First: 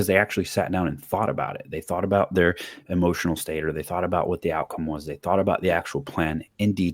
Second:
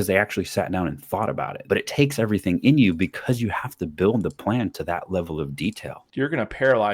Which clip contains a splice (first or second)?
second